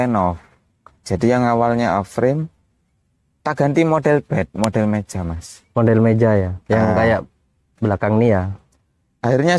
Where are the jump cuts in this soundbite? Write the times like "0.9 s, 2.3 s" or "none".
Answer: none